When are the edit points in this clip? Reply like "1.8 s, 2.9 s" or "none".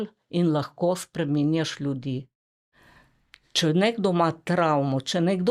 2.5 s